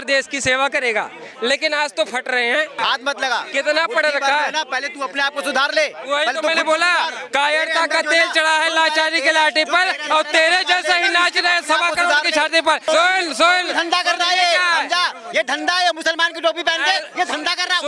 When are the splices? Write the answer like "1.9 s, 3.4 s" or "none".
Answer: 2.8 s, 12.8 s